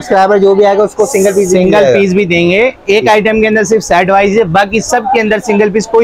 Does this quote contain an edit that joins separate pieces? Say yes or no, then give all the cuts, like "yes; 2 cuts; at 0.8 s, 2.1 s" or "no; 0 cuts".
no; 0 cuts